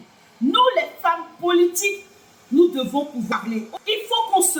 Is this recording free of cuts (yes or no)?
no